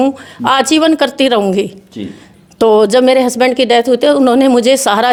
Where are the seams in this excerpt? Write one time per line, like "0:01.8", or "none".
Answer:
none